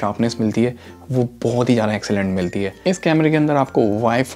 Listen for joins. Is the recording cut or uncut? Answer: cut